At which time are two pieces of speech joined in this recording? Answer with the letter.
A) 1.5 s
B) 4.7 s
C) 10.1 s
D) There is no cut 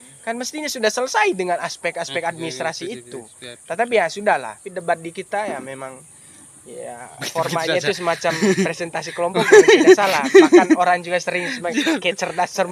B